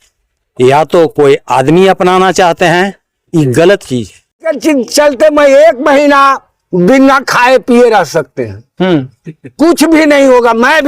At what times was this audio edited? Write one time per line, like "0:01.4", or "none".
0:04.6